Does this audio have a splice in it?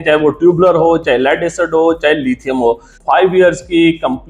yes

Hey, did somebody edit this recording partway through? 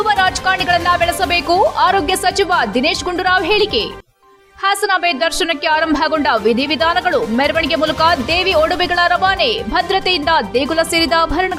no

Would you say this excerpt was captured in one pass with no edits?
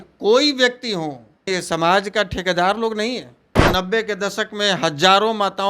no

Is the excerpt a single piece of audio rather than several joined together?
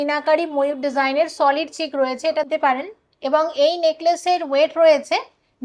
no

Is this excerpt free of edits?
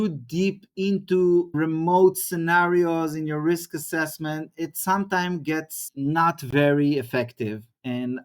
no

